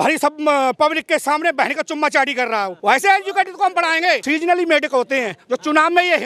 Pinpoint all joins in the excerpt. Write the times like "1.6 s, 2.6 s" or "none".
2.7 s, 4.2 s